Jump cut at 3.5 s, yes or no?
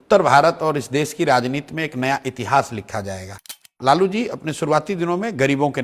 yes